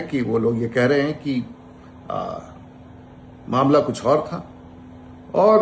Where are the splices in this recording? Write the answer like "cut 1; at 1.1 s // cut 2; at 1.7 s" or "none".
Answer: none

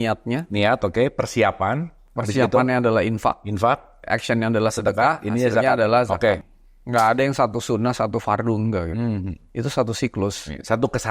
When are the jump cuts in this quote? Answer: cut 1; at 6.4 s

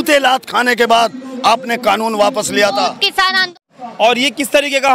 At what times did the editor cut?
cut 1; at 3.5 s

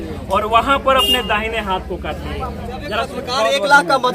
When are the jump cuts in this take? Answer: cut 1; at 3.1 s

